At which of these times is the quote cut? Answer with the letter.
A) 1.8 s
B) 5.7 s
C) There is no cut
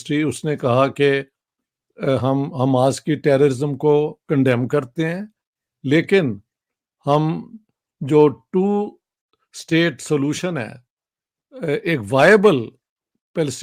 C